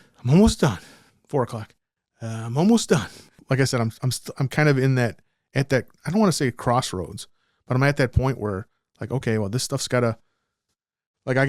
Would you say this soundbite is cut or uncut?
cut